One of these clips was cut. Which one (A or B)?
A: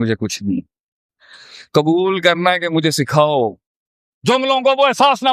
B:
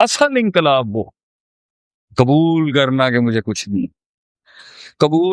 A